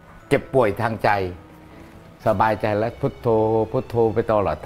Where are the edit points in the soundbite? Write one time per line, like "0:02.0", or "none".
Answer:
none